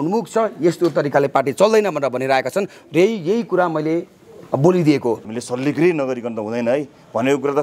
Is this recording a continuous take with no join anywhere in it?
no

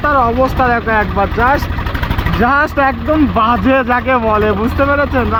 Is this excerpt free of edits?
yes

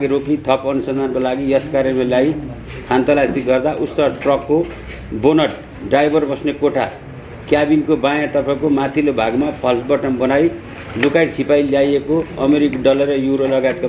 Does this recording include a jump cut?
no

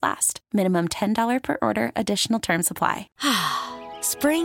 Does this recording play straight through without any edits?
no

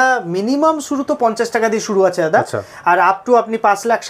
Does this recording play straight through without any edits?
yes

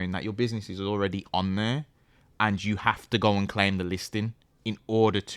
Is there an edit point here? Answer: no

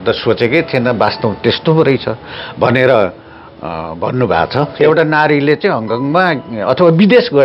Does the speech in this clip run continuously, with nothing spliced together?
no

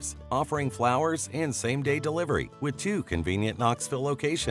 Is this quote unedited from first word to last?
yes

